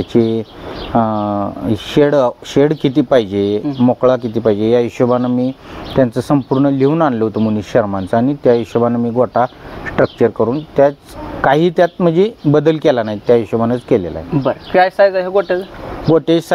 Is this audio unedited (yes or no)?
yes